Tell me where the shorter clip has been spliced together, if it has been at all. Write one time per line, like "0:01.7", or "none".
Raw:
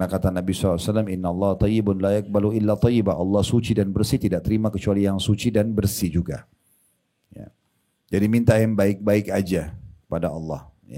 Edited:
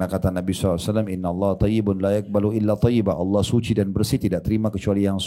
none